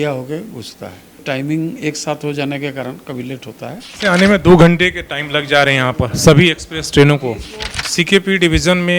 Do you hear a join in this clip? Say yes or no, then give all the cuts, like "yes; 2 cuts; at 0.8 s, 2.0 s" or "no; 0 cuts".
yes; 3 cuts; at 1.2 s, 3.9 s, 7.7 s